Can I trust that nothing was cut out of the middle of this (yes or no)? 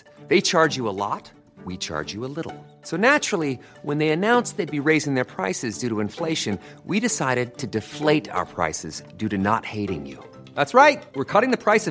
yes